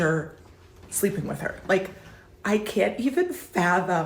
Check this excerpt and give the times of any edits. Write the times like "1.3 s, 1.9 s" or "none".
2.0 s